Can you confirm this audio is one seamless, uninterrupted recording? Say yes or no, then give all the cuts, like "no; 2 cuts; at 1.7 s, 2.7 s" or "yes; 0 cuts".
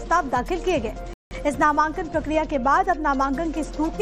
yes; 0 cuts